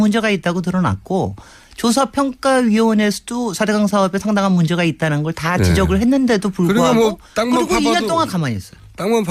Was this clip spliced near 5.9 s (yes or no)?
no